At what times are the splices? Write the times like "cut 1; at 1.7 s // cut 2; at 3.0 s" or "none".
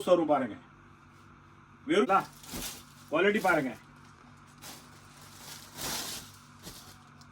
cut 1; at 2.0 s

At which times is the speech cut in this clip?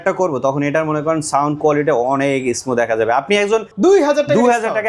cut 1; at 3.7 s

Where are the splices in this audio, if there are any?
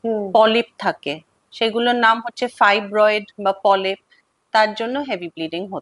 none

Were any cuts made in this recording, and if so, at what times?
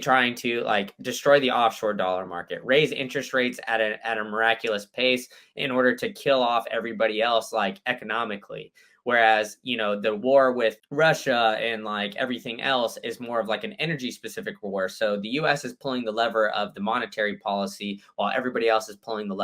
cut 1; at 10.8 s

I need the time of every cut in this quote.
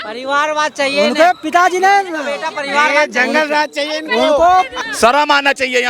cut 1; at 4.8 s

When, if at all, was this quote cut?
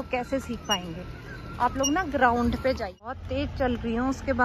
cut 1; at 3.2 s

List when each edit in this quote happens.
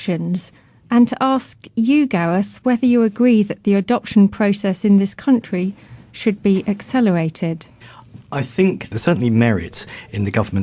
cut 1; at 6.1 s

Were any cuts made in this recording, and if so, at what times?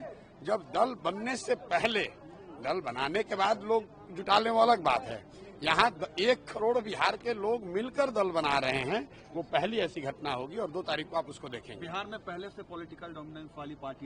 none

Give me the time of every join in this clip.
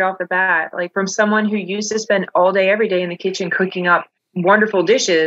cut 1; at 4.2 s

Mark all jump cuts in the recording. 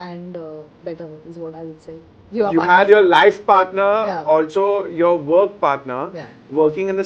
cut 1; at 2.2 s

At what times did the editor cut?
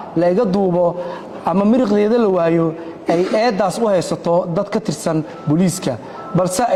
none

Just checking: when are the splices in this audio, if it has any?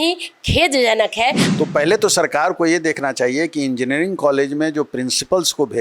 cut 1; at 1.4 s

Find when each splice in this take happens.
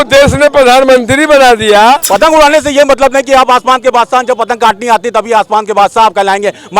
cut 1; at 2.0 s

